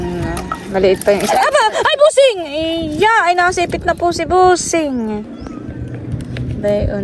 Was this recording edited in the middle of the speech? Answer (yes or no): yes